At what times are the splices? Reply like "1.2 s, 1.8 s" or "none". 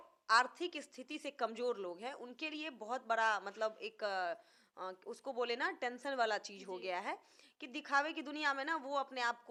none